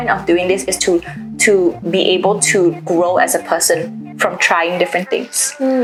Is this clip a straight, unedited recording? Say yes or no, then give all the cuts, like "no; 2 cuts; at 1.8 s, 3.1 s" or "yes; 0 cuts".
yes; 0 cuts